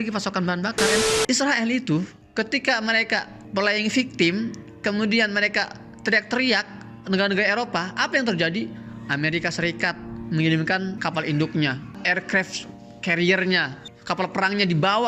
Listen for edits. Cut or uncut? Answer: cut